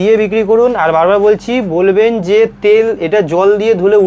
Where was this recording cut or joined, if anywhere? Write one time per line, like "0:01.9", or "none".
none